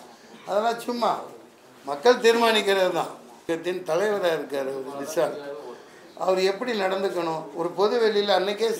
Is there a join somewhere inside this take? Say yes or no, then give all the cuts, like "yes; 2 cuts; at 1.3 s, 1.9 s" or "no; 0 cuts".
yes; 1 cut; at 3.5 s